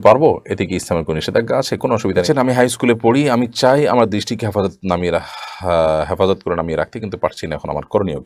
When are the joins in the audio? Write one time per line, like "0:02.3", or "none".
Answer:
0:02.2